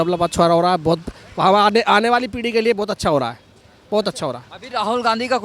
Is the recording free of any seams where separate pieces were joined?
yes; 0 cuts

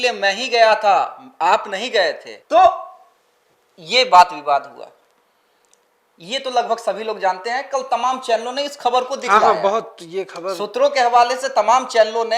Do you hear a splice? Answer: no; 0 cuts

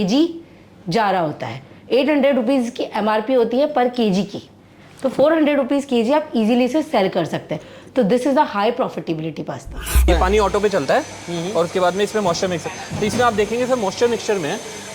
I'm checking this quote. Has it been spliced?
yes; 1 cut; at 10.1 s

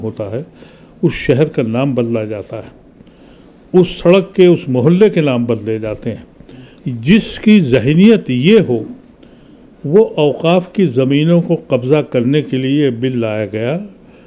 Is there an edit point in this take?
no; 0 cuts

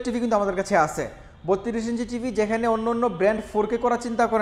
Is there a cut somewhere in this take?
no; 0 cuts

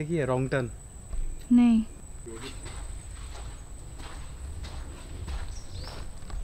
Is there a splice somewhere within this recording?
no; 0 cuts

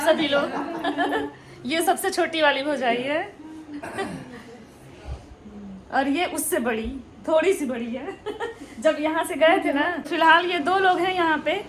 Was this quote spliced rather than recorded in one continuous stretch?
no; 0 cuts

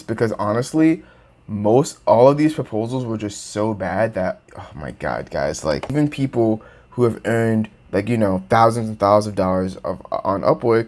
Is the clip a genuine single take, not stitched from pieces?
no; 1 cut; at 5.9 s

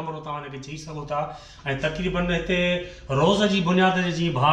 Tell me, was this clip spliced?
no; 0 cuts

